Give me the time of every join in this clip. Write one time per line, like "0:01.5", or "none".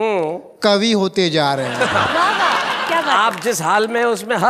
none